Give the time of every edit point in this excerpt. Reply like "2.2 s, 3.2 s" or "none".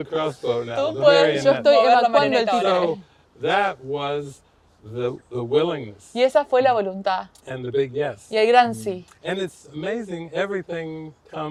none